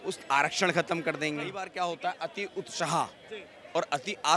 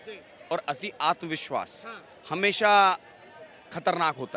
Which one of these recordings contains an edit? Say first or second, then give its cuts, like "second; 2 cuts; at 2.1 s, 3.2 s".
first; 1 cut; at 1.6 s